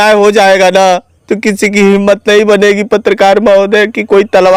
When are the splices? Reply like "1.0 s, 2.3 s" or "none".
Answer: none

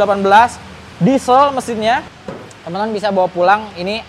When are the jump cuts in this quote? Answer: 2.2 s

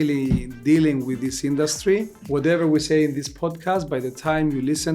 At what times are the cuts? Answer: 2.2 s

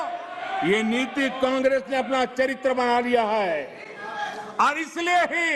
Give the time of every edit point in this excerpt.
none

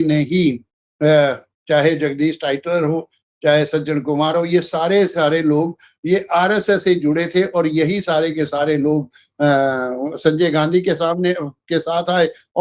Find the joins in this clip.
none

